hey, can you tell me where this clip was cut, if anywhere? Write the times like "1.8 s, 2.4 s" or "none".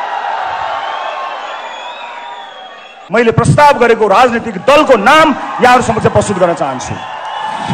3.0 s